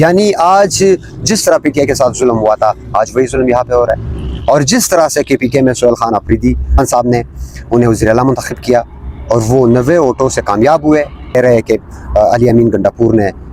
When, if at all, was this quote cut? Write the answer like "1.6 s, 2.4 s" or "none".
11.3 s